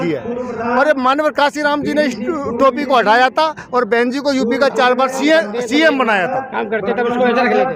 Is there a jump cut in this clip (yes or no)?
no